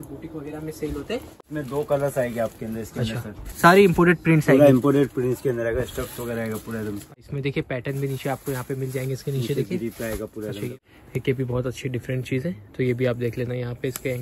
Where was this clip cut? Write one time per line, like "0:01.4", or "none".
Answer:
0:01.3
0:03.4
0:07.1
0:10.8